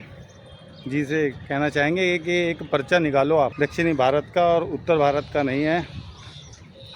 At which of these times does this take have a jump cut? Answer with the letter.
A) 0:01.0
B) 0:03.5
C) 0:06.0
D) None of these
B